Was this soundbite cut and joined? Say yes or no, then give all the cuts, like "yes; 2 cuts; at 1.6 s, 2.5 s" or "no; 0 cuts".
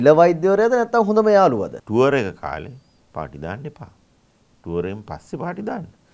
yes; 1 cut; at 1.8 s